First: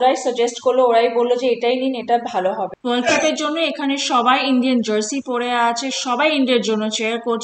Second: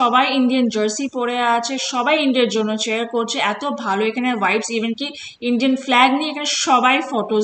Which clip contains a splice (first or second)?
first